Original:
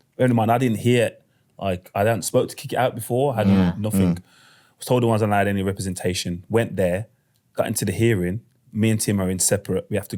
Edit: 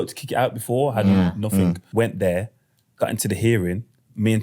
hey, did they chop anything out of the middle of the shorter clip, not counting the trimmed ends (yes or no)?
yes